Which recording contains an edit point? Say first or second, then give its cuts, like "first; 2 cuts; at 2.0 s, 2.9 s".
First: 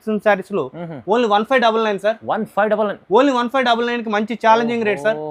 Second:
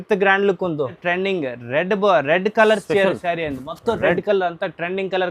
second; 1 cut; at 1.0 s